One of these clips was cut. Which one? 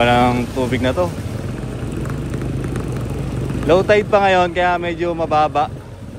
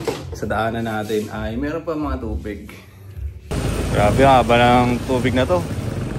second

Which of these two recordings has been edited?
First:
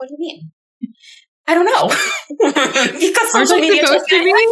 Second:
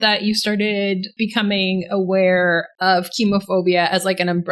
second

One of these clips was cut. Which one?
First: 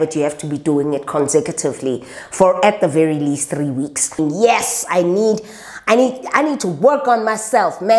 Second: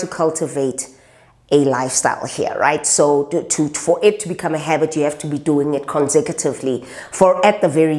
first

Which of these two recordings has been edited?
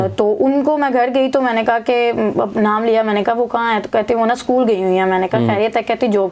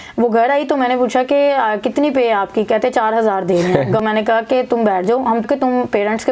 second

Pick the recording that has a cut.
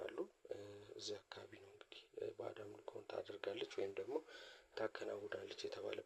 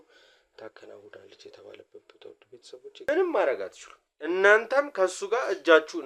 second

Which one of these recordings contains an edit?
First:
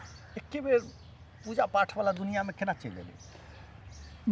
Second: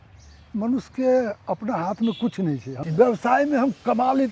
second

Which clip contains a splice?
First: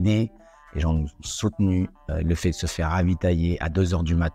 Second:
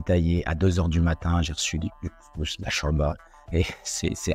first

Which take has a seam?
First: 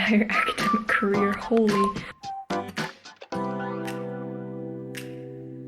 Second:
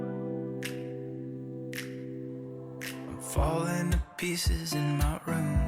first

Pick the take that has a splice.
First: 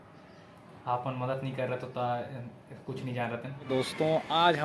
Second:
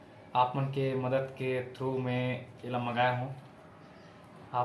first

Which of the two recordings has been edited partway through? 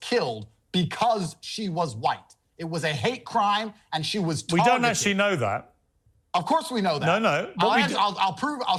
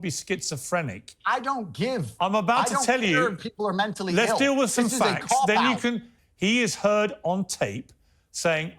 second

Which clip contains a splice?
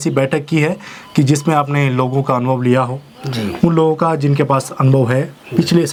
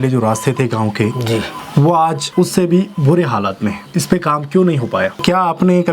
second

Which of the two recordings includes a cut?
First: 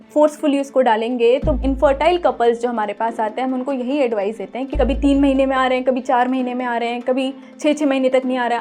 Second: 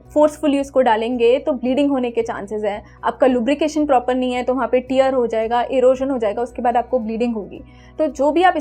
first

